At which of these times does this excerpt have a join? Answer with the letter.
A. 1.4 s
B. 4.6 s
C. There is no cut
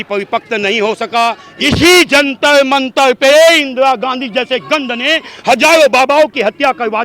A